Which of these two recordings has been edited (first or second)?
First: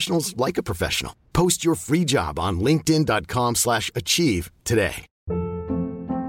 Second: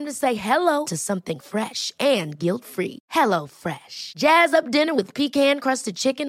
first